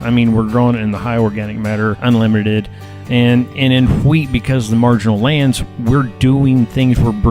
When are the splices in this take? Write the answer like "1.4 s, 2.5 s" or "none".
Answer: 2.0 s